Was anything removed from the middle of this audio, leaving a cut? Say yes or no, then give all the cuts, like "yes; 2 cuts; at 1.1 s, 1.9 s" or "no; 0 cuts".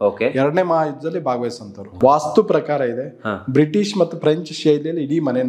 yes; 1 cut; at 1.8 s